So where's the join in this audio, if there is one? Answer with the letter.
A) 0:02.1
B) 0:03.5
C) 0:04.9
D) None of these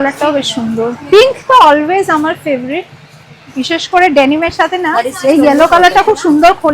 B